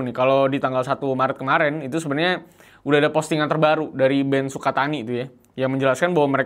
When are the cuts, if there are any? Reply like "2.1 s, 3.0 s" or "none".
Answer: none